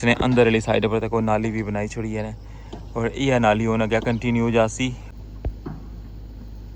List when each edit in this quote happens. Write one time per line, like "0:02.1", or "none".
0:05.1